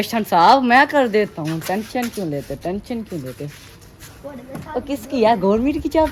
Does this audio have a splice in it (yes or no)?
no